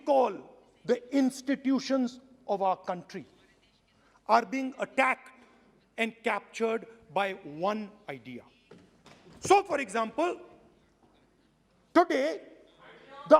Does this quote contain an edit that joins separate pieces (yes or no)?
yes